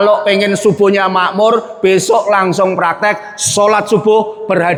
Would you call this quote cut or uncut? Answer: uncut